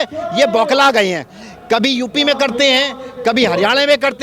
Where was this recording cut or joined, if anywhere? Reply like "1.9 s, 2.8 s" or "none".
none